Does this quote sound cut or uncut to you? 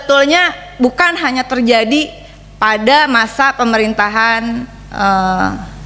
uncut